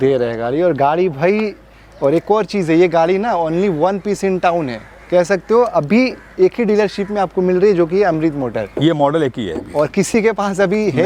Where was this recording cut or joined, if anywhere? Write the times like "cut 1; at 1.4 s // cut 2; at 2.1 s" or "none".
none

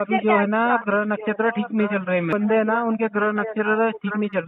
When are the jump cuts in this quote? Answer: cut 1; at 2.3 s

